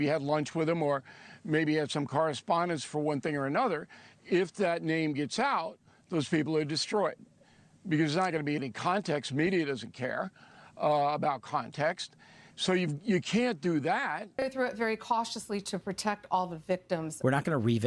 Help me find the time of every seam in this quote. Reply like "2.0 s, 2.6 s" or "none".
14.4 s